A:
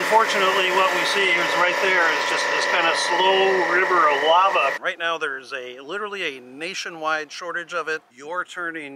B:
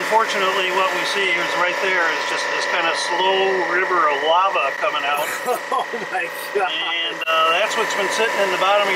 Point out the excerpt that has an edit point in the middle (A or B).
A